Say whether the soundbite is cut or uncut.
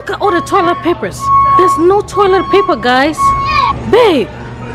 cut